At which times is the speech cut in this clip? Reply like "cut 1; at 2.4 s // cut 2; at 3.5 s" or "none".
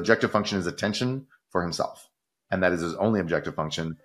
none